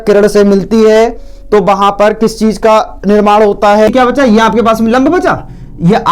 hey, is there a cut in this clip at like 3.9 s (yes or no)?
yes